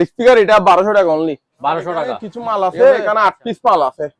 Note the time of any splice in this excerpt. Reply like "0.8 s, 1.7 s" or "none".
2.3 s

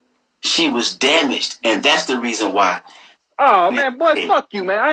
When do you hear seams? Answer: none

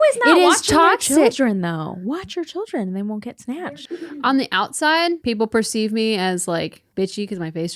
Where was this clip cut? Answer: 3.6 s, 5.2 s, 6.8 s

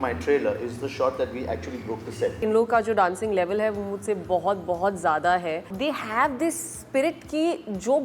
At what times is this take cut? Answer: 2.4 s, 5.7 s

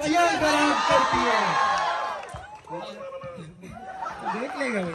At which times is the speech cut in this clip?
none

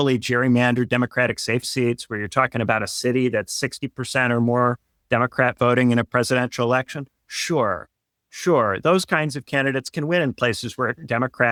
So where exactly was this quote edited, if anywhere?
none

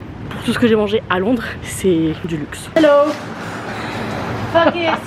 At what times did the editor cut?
1.6 s, 2.7 s

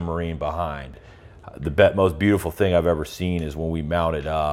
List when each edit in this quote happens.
0.9 s

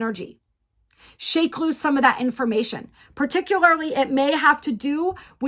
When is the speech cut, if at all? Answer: none

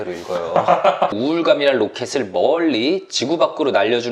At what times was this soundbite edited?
1.1 s

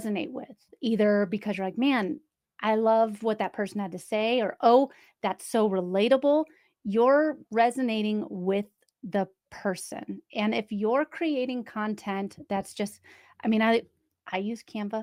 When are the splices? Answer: none

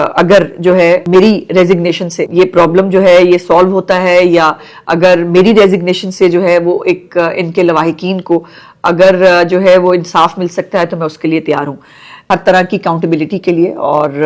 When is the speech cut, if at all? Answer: 1.0 s, 2.2 s, 12.2 s

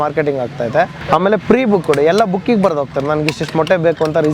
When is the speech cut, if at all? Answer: 1.0 s

